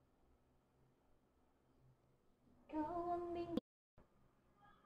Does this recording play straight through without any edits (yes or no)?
no